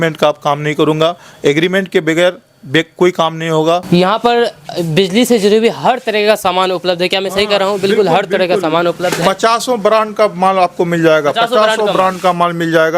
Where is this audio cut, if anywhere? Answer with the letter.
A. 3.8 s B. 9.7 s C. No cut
A